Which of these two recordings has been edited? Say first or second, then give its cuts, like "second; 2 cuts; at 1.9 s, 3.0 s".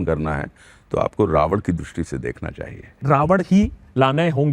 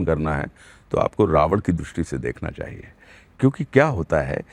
first; 1 cut; at 3.0 s